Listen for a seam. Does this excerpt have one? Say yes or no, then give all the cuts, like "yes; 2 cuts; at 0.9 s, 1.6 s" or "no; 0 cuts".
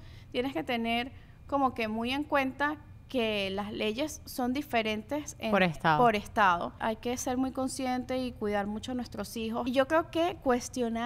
yes; 2 cuts; at 6.7 s, 9.6 s